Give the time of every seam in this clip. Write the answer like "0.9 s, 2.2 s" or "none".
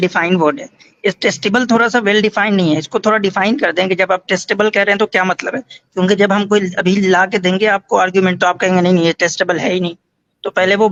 none

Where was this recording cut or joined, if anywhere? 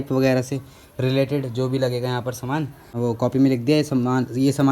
2.9 s

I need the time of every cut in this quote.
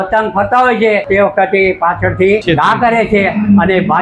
1.0 s, 2.4 s

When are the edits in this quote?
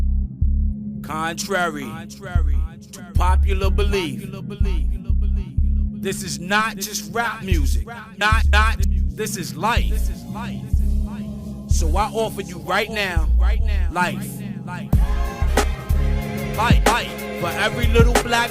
1.2 s

